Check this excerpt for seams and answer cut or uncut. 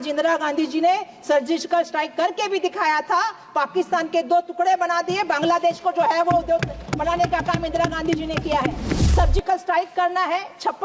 cut